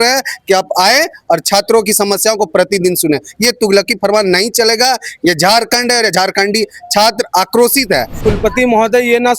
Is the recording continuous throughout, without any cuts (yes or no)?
no